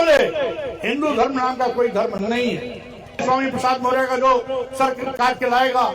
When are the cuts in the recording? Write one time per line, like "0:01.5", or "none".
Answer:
0:03.2